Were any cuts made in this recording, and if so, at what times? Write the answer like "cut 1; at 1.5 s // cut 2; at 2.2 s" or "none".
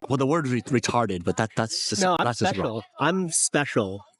none